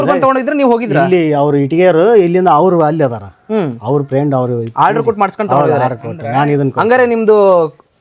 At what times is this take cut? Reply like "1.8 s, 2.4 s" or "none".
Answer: none